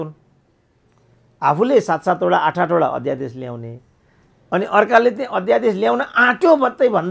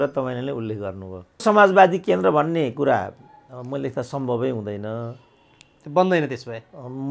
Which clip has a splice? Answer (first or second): second